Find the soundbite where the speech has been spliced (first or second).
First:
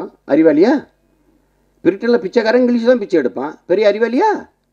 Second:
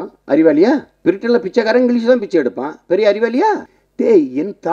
second